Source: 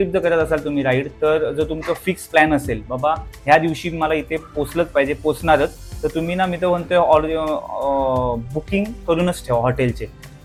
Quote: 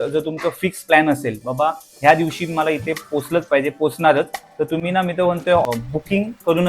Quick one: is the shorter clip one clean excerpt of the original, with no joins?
no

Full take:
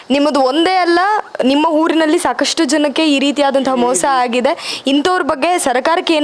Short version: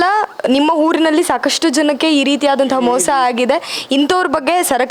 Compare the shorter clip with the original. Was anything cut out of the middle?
no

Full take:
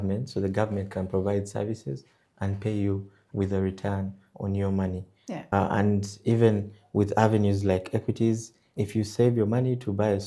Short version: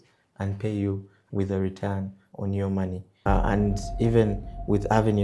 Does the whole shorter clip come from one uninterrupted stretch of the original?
no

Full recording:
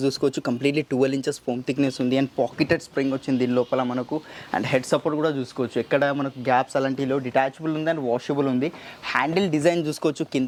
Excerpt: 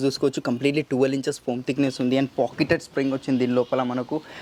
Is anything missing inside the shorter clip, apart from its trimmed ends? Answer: no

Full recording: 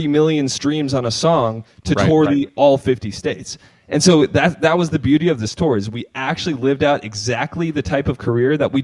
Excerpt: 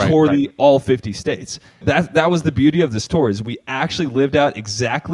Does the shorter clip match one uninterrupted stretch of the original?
no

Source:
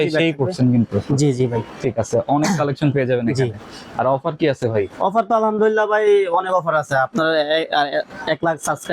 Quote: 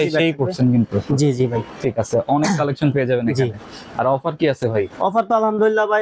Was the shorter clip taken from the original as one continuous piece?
yes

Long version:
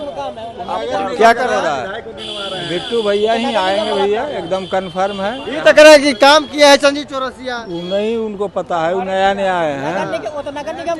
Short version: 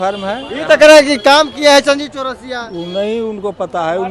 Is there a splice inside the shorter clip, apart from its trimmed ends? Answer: no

